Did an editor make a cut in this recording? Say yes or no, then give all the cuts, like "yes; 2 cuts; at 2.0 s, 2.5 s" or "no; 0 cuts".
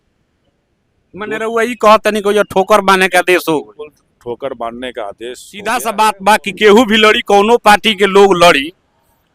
yes; 1 cut; at 5.5 s